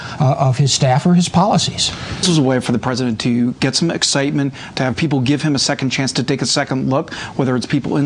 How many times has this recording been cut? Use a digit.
1